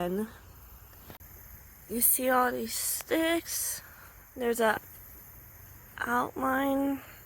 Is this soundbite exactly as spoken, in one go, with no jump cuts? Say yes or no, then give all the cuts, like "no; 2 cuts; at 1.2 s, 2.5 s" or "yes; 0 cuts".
no; 1 cut; at 1.2 s